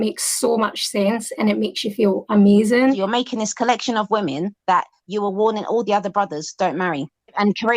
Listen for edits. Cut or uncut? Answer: cut